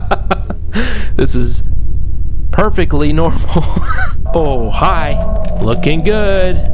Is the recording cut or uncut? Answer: cut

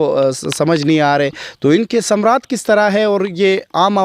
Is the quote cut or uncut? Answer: uncut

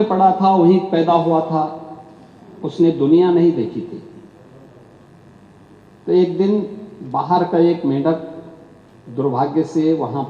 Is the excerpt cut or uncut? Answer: uncut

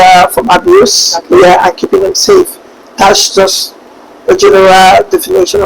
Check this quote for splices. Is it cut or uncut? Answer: uncut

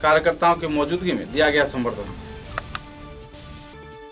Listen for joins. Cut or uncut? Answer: uncut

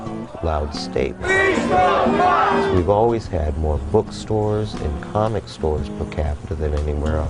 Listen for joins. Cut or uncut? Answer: cut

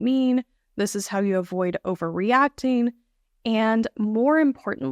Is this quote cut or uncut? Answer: uncut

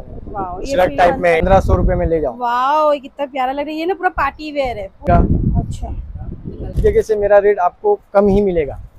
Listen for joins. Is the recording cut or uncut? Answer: cut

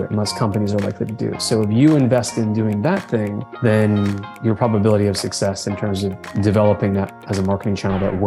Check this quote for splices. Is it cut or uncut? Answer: uncut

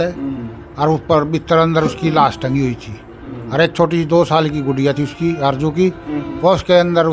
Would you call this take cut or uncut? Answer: uncut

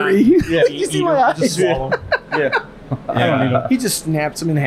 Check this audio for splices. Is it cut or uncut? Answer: uncut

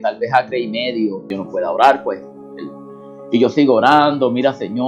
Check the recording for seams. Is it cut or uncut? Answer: cut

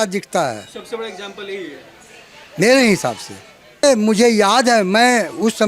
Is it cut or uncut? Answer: cut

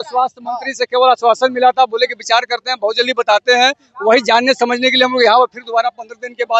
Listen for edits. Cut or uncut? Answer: uncut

